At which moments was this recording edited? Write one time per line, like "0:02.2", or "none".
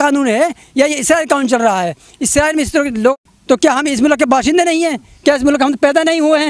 0:03.1